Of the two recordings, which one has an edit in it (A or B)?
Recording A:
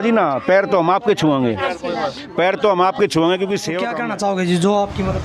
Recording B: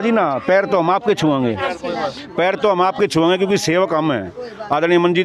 A